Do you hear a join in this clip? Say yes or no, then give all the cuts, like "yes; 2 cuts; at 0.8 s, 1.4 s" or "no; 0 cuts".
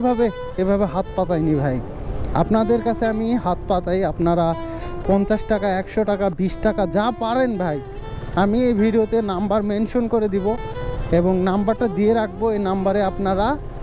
no; 0 cuts